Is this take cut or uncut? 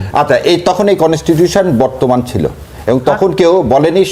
uncut